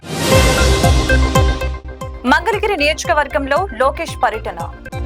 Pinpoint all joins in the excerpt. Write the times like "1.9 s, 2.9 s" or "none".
1.8 s